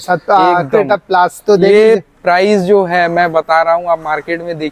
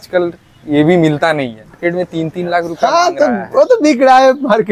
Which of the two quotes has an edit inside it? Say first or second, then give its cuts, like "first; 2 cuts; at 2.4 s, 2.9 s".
second; 1 cut; at 1.6 s